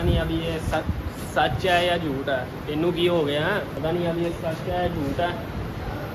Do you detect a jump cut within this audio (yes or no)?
yes